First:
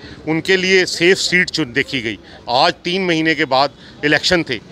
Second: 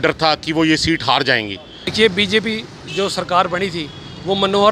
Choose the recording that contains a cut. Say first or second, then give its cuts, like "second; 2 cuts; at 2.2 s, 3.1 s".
second; 1 cut; at 1.9 s